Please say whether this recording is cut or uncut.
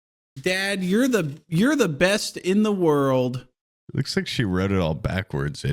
cut